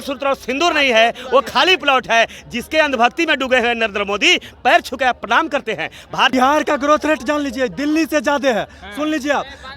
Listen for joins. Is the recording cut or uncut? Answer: cut